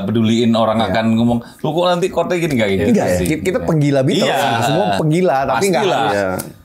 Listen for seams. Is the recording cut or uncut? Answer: uncut